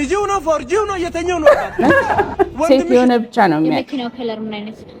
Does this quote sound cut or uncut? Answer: cut